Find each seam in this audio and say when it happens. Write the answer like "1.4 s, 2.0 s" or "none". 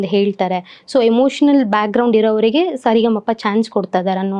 none